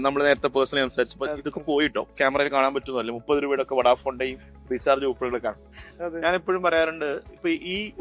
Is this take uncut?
no; 1 cut; at 2.1 s

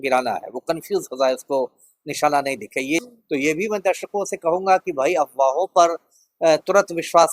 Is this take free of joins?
no; 1 cut; at 3.0 s

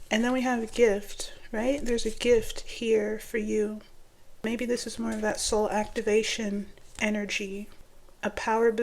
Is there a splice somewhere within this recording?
yes; 2 cuts; at 4.3 s, 7.7 s

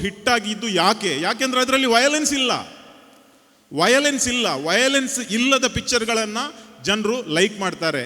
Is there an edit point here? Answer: no; 0 cuts

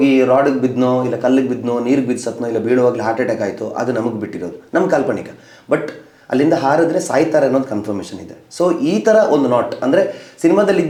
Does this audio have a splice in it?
no; 0 cuts

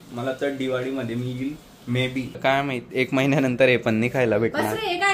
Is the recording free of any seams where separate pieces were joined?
no; 1 cut; at 2.3 s

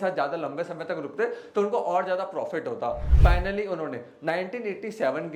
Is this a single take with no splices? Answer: yes; 0 cuts

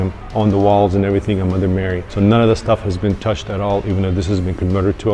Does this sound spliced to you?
no; 0 cuts

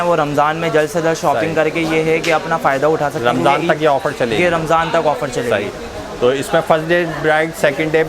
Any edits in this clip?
no; 0 cuts

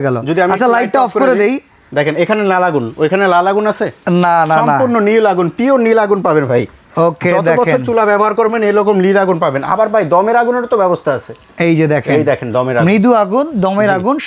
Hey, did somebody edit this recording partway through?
no; 0 cuts

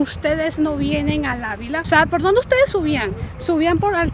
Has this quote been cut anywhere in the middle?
no; 0 cuts

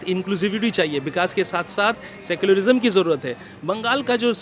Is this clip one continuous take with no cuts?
yes; 0 cuts

